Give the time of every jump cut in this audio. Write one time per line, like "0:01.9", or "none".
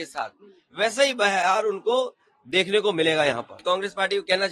0:03.5